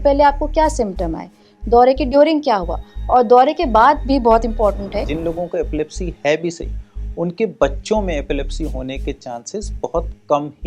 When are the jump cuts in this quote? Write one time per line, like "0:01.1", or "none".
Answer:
0:05.0